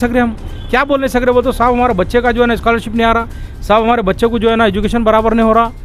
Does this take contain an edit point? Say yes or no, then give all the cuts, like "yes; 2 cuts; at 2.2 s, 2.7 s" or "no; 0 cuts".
no; 0 cuts